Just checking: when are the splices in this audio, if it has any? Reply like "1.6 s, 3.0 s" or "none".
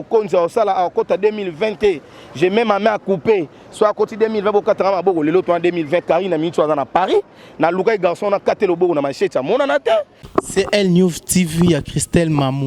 10.2 s